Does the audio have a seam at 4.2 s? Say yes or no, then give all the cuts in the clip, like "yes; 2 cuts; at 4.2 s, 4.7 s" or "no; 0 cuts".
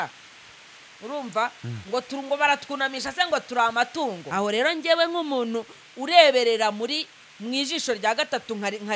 yes; 1 cut; at 4.2 s